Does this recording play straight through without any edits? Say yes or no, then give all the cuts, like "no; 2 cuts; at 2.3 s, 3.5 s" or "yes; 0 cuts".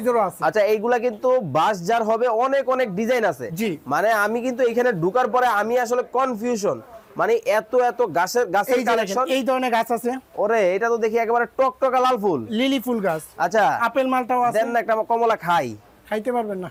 yes; 0 cuts